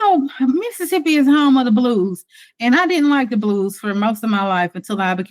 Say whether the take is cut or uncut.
uncut